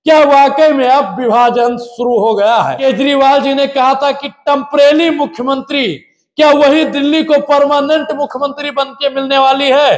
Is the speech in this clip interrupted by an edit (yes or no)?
yes